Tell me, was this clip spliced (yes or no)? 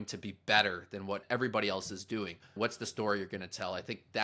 yes